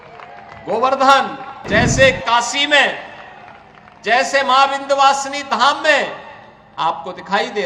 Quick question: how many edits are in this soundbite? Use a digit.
1